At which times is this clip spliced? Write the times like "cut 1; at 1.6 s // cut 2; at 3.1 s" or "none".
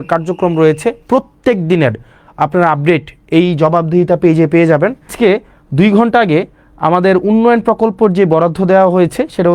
cut 1; at 5.1 s